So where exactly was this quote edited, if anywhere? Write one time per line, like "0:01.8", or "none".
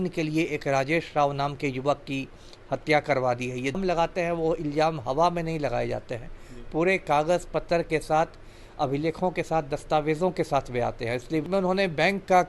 0:03.8
0:11.4